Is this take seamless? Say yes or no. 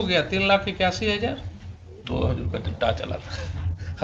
yes